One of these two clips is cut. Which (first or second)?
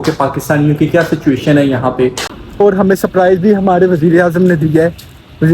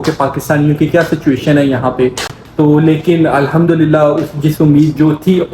first